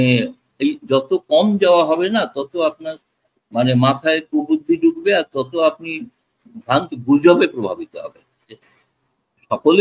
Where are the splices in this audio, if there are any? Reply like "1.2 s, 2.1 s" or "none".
8.6 s